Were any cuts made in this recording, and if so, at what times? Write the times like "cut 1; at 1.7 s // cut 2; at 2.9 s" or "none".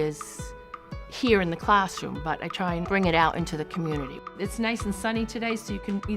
cut 1; at 4.3 s